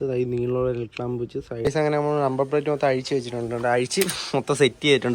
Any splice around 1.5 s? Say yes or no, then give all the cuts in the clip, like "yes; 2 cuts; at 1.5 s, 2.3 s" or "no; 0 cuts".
yes; 1 cut; at 1.5 s